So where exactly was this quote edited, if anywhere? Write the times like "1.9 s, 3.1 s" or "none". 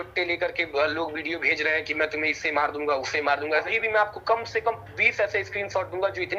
3.7 s